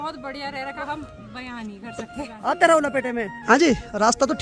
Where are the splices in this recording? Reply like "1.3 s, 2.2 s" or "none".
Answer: 0.8 s, 2.1 s, 3.3 s

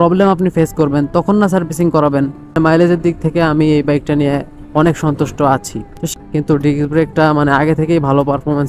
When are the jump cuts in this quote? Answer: 2.4 s, 6.0 s

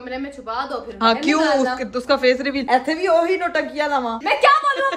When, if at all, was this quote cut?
0.9 s, 2.6 s, 4.2 s

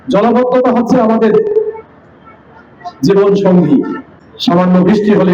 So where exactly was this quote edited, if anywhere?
none

